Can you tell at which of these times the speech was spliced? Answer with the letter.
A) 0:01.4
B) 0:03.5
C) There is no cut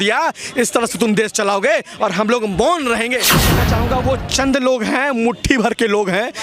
B